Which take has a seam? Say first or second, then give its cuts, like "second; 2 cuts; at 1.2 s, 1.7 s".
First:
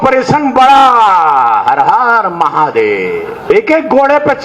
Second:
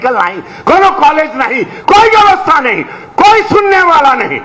first; 1 cut; at 3.4 s